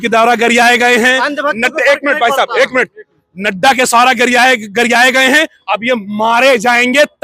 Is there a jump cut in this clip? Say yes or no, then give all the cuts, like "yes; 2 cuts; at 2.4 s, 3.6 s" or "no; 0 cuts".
no; 0 cuts